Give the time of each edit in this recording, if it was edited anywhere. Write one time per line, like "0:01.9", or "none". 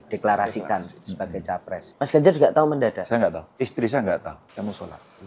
0:01.9
0:03.4
0:04.4